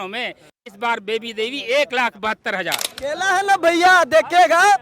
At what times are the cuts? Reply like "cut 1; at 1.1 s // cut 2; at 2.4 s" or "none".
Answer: cut 1; at 2.9 s

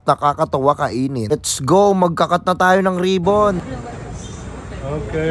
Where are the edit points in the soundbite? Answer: cut 1; at 1.3 s

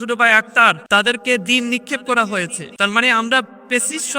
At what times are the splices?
cut 1; at 0.8 s // cut 2; at 2.6 s

